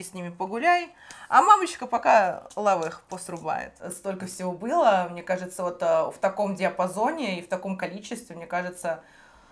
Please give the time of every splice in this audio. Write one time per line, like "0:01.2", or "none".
0:03.9